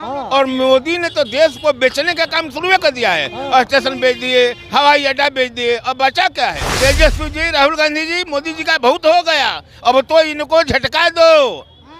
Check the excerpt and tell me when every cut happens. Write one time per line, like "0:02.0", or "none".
0:06.6

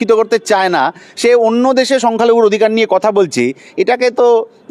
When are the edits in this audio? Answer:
none

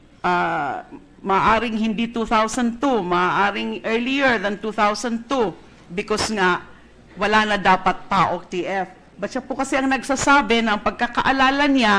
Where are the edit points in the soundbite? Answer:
0:05.7

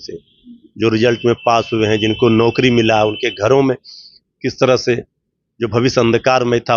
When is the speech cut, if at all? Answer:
none

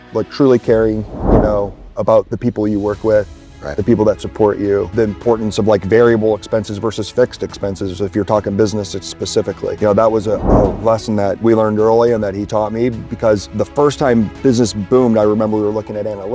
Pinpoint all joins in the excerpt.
0:04.9
0:09.8
0:11.4
0:13.5

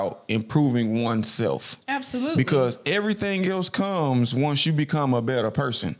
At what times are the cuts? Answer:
none

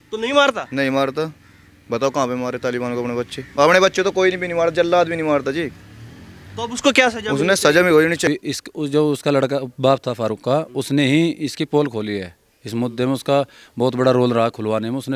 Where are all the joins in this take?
0:08.3

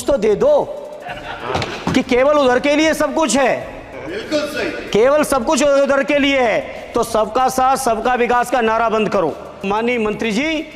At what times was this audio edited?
0:09.6

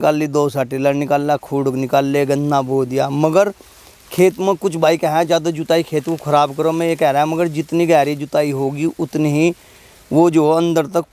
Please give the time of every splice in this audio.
none

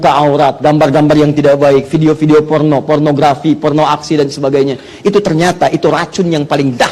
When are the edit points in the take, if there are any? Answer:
none

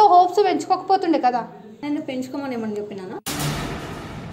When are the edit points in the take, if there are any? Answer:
none

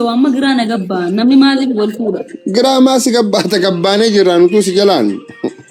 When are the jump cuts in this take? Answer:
none

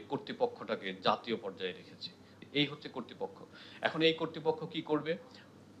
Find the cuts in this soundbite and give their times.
0:02.2

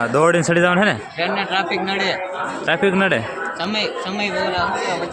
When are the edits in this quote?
none

